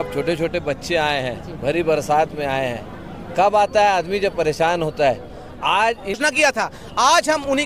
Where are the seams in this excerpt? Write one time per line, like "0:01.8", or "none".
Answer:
0:06.2